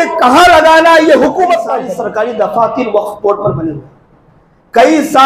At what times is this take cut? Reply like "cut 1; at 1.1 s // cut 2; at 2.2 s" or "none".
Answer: cut 1; at 1.9 s

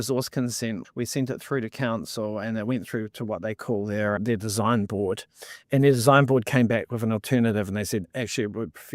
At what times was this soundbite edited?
cut 1; at 0.8 s // cut 2; at 4.2 s

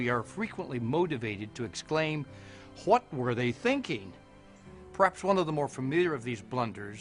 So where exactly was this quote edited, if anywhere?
cut 1; at 2.1 s

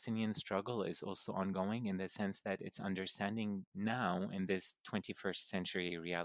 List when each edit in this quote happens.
none

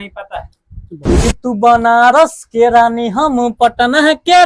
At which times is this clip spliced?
cut 1; at 1.2 s

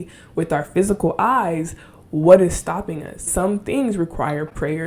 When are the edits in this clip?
cut 1; at 3.3 s

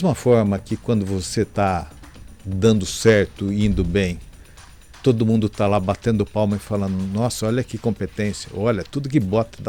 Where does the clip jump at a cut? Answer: none

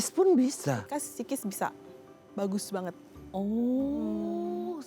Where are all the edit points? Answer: none

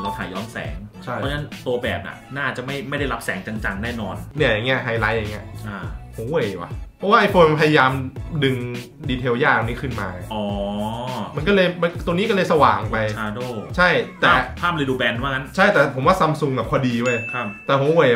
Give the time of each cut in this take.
cut 1; at 4.3 s

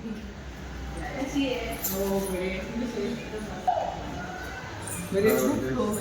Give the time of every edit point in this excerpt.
cut 1; at 3.7 s

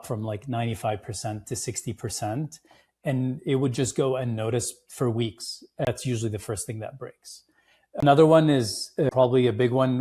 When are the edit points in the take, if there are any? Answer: cut 1; at 5.9 s // cut 2; at 8.0 s // cut 3; at 9.1 s

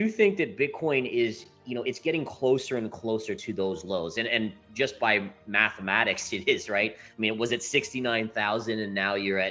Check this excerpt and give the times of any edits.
none

